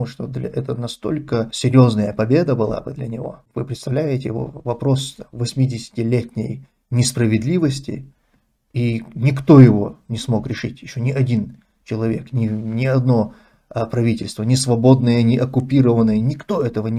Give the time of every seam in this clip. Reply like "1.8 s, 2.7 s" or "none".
1.5 s, 3.4 s